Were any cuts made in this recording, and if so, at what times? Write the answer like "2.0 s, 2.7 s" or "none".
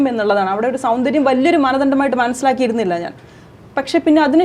none